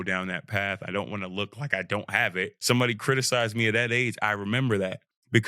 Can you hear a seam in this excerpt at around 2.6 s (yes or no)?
yes